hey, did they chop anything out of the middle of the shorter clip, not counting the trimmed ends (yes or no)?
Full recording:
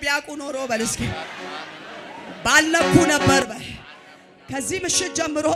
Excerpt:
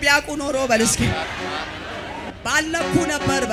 no